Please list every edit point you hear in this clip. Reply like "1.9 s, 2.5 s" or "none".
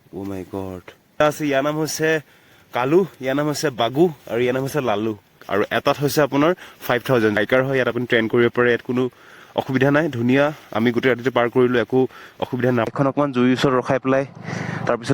1.2 s, 5.4 s, 7.4 s, 12.9 s